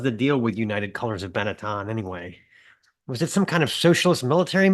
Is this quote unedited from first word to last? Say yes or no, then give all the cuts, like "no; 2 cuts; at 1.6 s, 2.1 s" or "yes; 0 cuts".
yes; 0 cuts